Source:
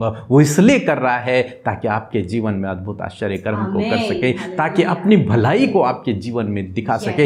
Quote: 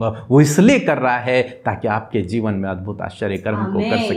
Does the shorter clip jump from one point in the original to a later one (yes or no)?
no